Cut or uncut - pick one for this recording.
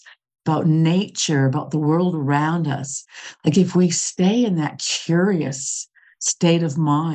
uncut